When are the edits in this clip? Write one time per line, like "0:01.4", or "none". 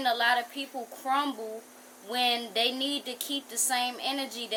none